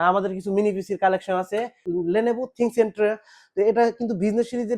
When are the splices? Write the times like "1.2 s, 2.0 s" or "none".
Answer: 1.8 s